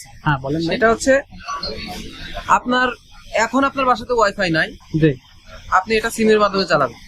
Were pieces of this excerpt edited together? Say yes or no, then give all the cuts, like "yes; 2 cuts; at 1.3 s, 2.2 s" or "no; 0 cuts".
no; 0 cuts